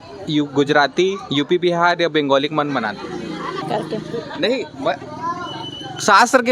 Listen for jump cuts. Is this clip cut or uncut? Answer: cut